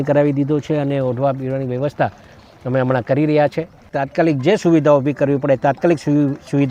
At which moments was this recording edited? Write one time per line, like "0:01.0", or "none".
0:03.9